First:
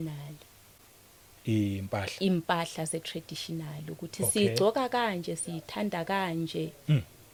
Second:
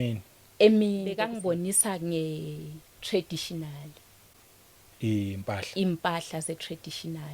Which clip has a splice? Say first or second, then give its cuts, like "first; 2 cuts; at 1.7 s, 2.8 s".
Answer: second; 1 cut; at 1.3 s